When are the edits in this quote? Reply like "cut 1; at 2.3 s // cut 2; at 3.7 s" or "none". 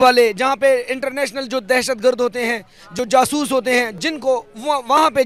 none